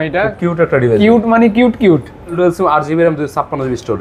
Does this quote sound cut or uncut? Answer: cut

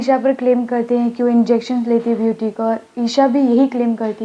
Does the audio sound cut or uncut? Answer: uncut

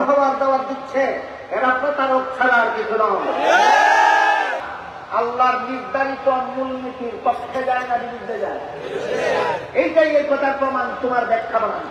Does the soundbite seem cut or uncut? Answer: cut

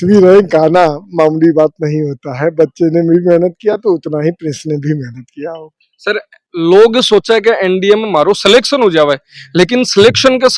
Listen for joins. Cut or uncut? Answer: uncut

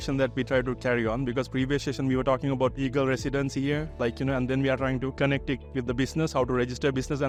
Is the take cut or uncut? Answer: uncut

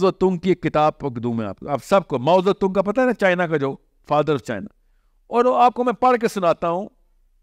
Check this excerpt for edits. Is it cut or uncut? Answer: uncut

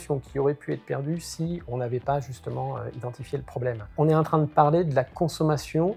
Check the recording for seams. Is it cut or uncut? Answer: uncut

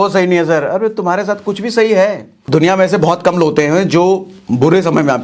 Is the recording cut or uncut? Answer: cut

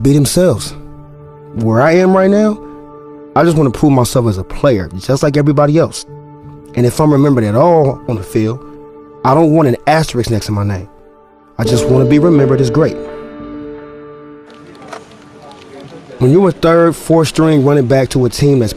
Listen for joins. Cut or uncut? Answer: uncut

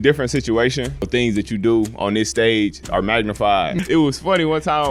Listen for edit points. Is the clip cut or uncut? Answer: cut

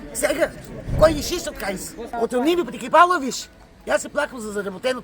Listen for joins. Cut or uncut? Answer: cut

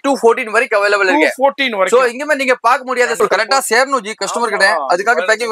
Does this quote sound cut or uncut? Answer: cut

